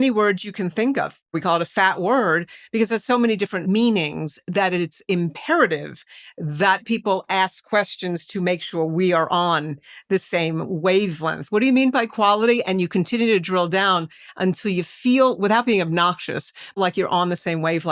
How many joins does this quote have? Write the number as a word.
two